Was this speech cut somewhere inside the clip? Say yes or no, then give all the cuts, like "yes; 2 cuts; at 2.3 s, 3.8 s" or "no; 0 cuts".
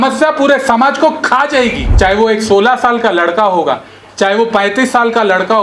yes; 1 cut; at 1.8 s